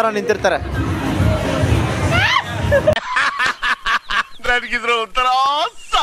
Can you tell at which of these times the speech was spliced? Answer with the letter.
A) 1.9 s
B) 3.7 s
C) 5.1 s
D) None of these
D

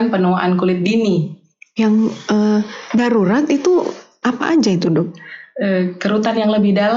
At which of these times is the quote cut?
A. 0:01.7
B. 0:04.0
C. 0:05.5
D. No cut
A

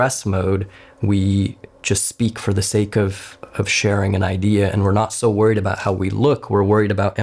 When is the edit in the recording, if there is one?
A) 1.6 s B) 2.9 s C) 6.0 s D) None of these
D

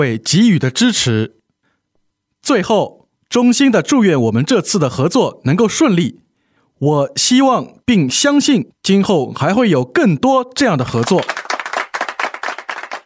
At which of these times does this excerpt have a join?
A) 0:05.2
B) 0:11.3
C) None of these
B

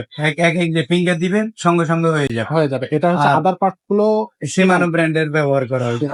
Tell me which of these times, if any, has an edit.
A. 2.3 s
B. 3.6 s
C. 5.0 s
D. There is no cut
D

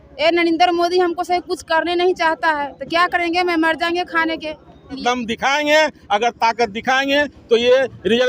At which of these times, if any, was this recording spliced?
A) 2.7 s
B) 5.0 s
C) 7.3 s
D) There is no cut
B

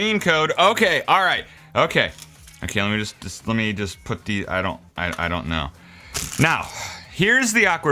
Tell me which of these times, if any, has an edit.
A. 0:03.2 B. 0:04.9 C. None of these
C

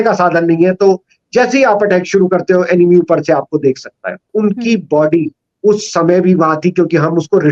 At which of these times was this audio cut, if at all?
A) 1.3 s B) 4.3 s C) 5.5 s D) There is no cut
B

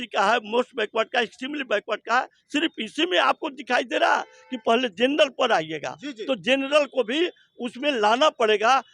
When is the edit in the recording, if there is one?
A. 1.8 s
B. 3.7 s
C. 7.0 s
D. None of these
D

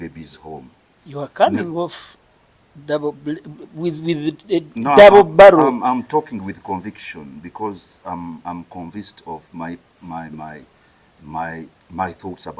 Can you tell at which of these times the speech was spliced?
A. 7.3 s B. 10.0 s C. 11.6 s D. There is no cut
D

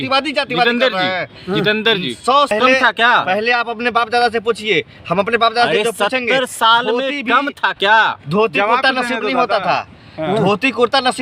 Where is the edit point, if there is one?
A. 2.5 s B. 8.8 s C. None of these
A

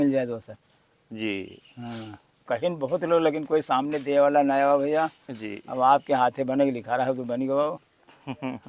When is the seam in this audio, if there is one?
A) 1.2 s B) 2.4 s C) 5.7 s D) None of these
B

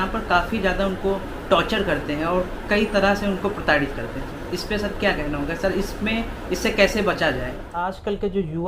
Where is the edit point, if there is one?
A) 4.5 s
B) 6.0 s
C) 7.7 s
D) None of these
C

